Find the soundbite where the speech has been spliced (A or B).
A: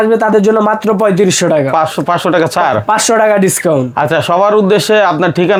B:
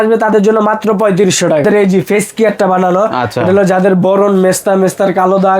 B